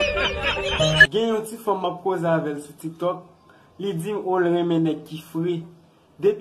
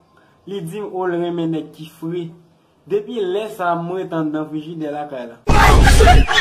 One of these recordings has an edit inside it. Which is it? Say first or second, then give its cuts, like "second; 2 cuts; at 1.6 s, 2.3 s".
first; 1 cut; at 1.1 s